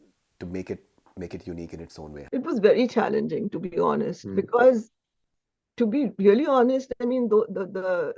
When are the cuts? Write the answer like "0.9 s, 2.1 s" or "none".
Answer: 2.2 s